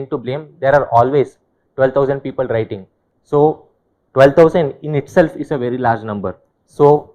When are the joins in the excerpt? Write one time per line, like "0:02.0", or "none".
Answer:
none